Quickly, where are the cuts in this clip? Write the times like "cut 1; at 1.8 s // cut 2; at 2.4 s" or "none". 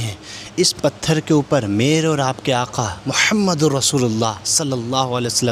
none